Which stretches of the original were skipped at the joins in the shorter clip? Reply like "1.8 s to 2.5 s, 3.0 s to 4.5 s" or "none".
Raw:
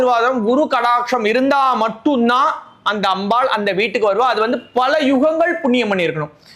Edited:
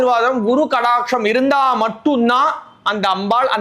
none